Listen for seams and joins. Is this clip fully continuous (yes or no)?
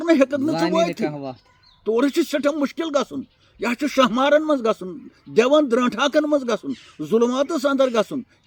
yes